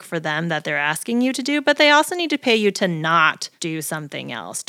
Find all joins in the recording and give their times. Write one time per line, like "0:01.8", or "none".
0:03.5